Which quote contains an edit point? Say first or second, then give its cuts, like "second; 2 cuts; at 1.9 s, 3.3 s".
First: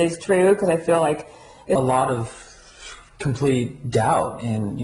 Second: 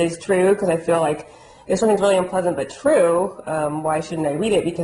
second; 1 cut; at 1.8 s